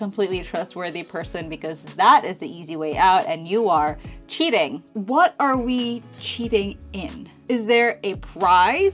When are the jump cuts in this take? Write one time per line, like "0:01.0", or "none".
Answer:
0:04.9
0:07.4